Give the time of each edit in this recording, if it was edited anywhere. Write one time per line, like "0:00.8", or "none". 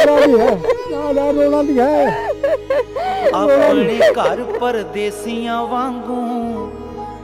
0:04.2